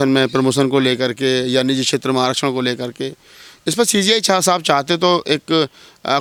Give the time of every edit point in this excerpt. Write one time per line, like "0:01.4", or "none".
none